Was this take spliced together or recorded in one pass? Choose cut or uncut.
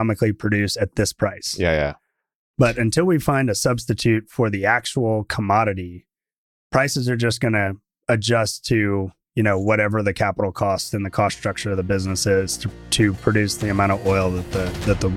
uncut